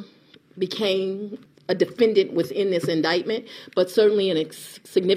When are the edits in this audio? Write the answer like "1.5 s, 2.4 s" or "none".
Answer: 1.4 s

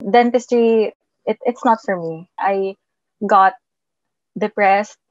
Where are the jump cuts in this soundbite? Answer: 2.3 s

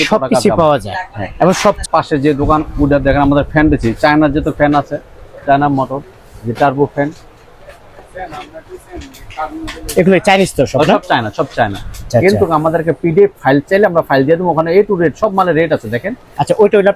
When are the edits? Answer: 1.8 s, 12.1 s

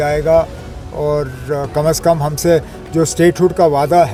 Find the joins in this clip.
none

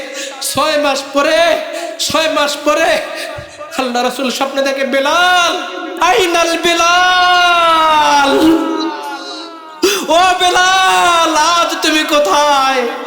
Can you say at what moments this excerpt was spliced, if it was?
5.9 s

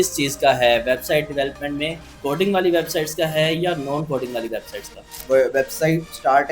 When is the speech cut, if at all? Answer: 2.1 s, 5.1 s

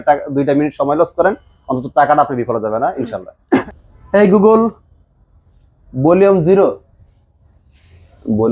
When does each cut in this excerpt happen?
3.7 s

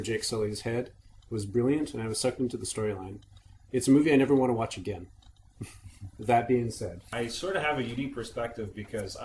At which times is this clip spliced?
none

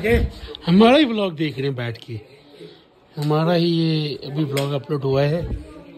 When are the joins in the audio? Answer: none

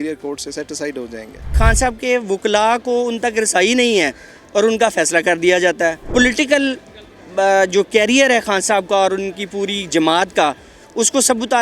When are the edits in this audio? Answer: 1.5 s, 6.0 s

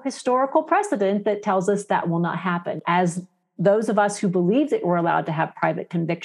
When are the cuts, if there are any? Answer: 2.8 s

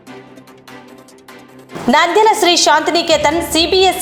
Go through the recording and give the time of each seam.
none

